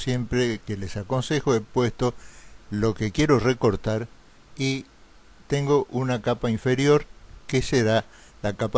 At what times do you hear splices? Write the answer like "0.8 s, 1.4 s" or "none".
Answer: 3.0 s